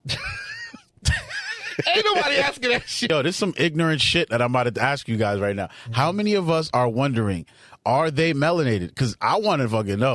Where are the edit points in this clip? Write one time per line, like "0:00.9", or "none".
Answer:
0:03.1